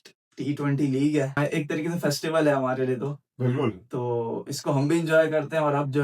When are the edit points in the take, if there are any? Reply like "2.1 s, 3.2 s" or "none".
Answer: 1.3 s

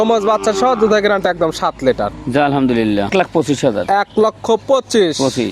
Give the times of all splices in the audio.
3.1 s

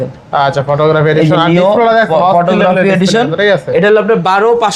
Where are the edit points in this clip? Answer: none

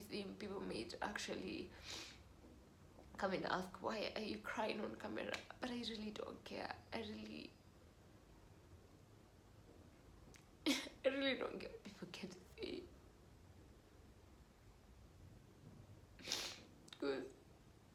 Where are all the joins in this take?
none

